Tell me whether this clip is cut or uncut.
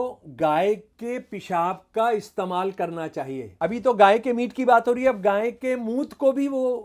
cut